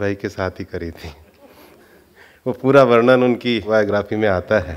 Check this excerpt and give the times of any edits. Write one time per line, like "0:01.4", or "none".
0:03.6